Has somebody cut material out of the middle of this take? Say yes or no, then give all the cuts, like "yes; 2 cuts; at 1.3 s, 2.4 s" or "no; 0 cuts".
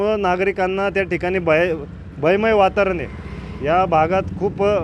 no; 0 cuts